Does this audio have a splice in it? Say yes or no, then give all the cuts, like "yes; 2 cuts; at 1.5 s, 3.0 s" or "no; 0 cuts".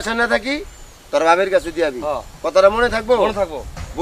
no; 0 cuts